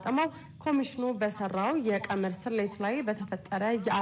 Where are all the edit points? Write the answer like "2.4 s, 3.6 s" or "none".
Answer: 2.3 s